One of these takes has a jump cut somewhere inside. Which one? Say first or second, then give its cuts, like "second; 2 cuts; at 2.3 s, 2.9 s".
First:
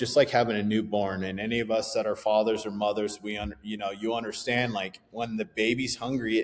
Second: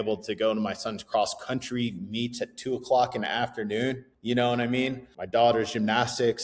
second; 2 cuts; at 4.1 s, 5.1 s